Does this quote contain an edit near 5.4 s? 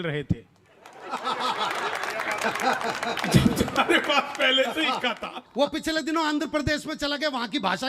yes; 1 cut; at 5.4 s

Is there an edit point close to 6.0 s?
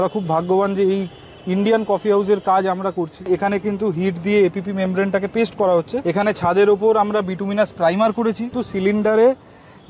yes; 3 cuts; at 3.2 s, 6.0 s, 8.6 s

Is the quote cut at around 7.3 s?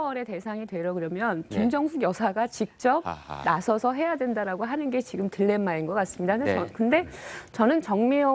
no; 0 cuts

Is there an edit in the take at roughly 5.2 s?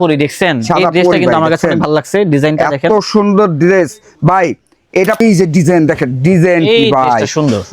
yes; 1 cut; at 5.2 s

